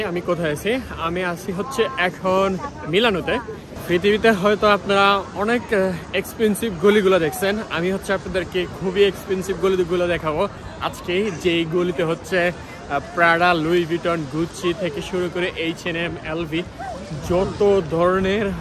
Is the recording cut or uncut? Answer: cut